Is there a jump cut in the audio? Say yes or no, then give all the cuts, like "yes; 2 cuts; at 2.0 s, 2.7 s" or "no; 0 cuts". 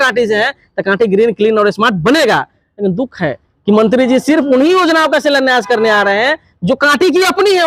no; 0 cuts